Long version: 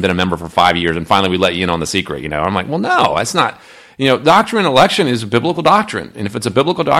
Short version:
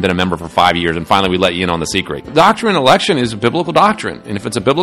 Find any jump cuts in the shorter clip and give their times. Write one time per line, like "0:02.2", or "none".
0:02.3